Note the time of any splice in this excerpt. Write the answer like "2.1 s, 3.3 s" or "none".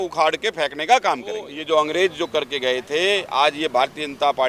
1.5 s